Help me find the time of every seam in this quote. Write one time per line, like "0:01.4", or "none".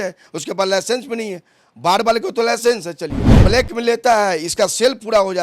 0:03.3